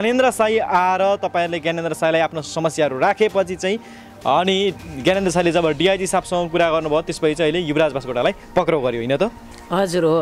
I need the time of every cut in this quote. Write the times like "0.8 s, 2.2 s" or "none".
none